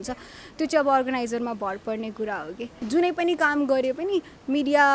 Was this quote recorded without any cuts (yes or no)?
no